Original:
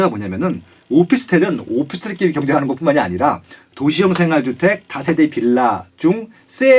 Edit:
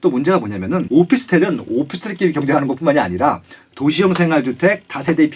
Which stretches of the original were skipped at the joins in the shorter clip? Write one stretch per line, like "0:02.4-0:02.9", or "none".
none